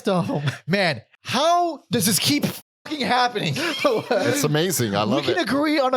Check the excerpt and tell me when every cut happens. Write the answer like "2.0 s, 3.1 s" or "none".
1.1 s

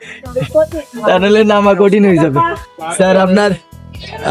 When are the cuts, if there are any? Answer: 2.6 s

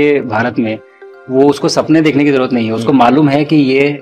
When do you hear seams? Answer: none

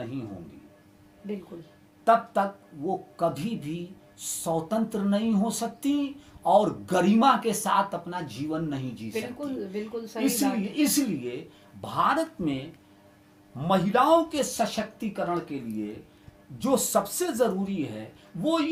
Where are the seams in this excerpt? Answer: none

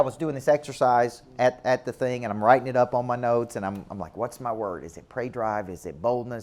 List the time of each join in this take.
none

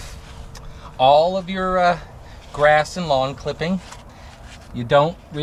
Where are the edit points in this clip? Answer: none

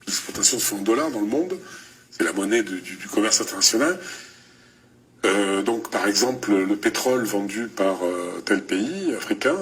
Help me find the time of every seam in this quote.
none

